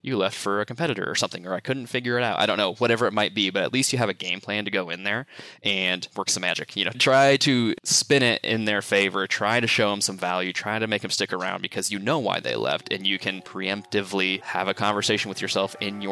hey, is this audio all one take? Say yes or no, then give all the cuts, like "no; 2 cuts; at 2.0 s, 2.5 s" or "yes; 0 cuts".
no; 2 cuts; at 13.4 s, 14.4 s